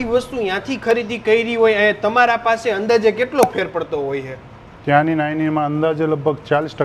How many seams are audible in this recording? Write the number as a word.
zero